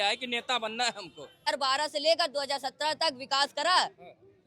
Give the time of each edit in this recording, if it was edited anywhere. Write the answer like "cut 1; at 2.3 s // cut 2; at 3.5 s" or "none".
cut 1; at 1.5 s